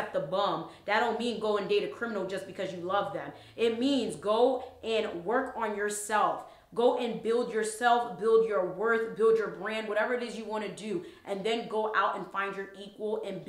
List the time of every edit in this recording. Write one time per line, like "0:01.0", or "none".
none